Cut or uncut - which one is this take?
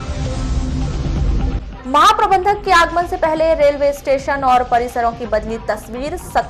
uncut